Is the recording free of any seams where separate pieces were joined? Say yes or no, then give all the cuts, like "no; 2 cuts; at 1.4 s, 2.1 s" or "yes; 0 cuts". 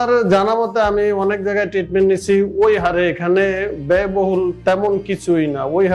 yes; 0 cuts